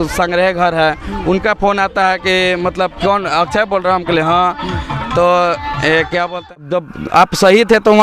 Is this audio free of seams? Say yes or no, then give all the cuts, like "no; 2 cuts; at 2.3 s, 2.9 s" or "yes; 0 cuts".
no; 1 cut; at 6.7 s